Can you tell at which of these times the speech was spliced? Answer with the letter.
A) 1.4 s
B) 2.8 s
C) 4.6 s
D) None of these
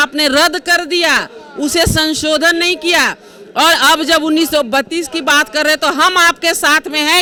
D